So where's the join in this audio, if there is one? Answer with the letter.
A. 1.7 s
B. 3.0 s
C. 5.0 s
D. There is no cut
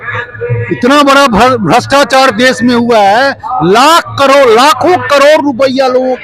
D